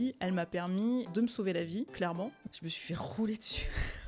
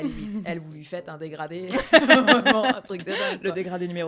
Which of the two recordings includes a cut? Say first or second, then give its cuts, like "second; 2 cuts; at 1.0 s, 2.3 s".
first; 2 cuts; at 1.1 s, 2.1 s